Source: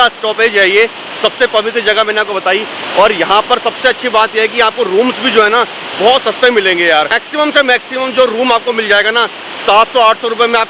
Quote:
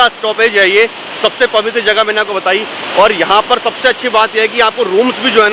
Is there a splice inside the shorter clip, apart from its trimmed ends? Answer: no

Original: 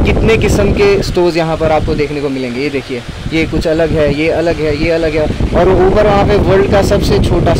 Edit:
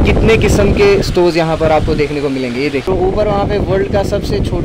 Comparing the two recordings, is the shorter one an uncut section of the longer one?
no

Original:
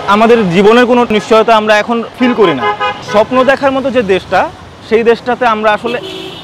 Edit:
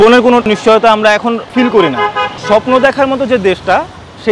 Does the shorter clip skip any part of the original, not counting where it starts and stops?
no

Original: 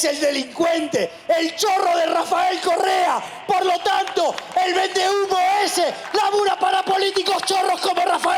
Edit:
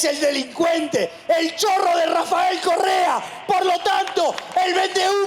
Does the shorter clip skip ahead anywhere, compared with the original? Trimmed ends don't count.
no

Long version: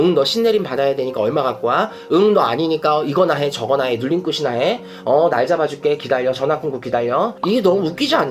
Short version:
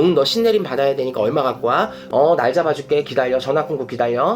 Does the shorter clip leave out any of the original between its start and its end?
yes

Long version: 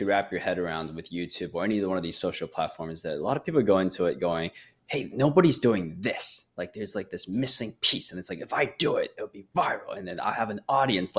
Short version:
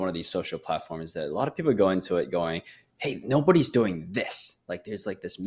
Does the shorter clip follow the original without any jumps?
yes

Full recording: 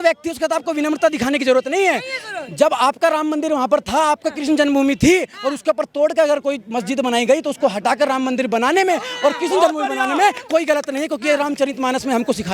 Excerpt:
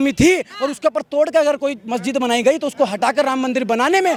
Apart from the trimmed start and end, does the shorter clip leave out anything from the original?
no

